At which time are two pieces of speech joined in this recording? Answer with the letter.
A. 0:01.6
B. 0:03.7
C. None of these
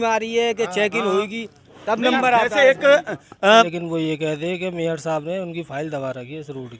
B